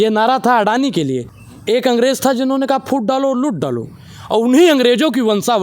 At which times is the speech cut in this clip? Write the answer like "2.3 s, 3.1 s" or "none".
1.3 s